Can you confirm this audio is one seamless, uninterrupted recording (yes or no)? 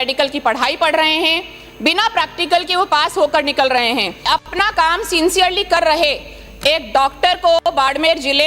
no